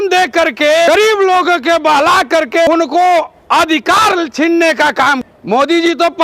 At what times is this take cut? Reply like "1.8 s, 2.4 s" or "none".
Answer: 0.9 s, 2.7 s, 5.2 s